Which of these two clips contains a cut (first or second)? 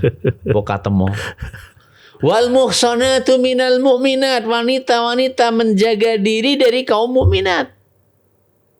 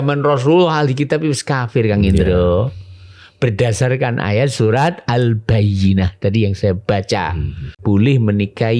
second